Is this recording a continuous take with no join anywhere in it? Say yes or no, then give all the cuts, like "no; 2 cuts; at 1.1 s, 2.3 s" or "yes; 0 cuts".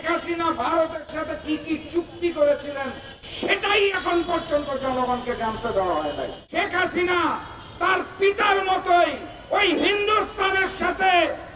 no; 1 cut; at 6.4 s